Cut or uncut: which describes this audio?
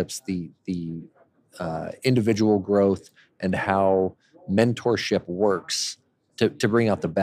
cut